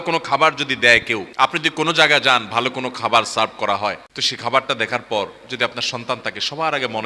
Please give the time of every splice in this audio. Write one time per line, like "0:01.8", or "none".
0:01.3
0:04.6